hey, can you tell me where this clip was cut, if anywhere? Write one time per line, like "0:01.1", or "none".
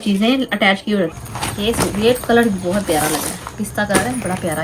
0:01.2

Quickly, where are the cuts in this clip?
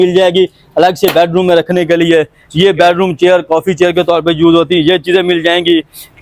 none

